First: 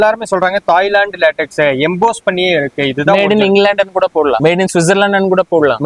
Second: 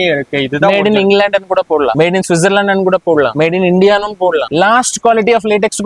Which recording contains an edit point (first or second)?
second